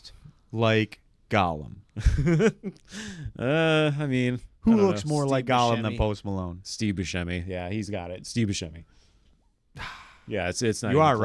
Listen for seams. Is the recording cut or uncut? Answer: uncut